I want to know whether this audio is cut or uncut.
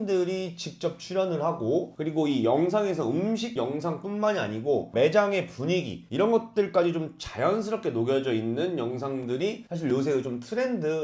uncut